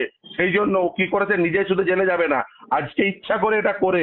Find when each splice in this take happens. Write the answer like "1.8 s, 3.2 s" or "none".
none

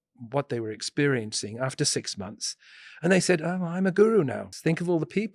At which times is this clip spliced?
4.4 s

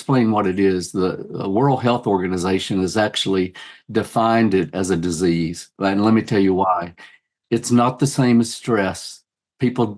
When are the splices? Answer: none

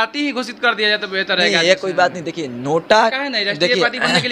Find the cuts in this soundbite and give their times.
none

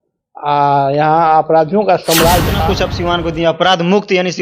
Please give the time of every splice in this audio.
2.6 s

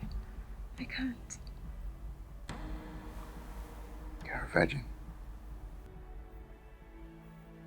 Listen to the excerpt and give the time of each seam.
5.9 s

